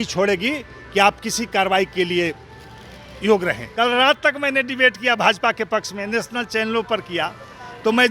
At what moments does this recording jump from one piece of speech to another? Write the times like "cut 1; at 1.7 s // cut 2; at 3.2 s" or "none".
cut 1; at 3.6 s